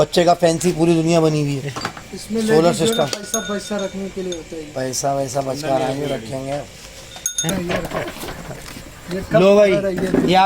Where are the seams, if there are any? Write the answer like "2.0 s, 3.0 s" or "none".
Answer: 7.5 s